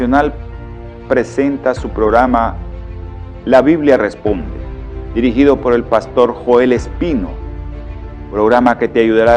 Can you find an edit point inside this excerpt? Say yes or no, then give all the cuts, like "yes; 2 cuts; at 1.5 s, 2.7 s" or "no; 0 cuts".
yes; 1 cut; at 1.3 s